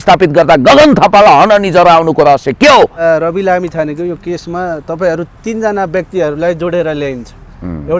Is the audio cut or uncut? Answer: cut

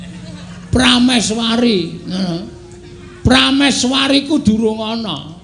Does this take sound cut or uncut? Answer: uncut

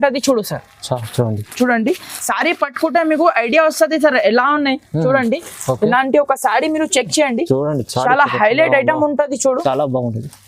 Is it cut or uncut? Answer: uncut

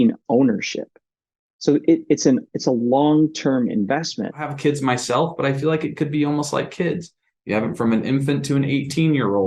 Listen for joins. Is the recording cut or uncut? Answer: cut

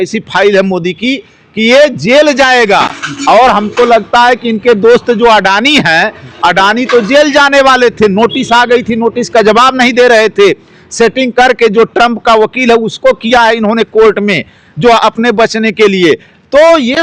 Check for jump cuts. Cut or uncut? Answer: uncut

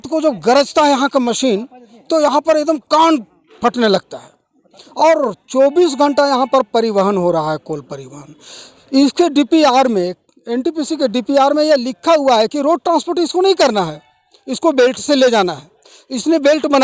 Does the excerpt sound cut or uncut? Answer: uncut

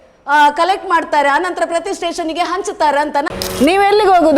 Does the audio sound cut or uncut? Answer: cut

